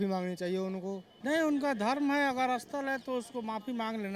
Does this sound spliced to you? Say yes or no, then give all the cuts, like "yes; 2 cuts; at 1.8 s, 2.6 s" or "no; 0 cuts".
no; 0 cuts